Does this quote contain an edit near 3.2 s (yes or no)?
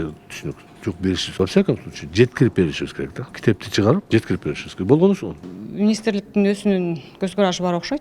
yes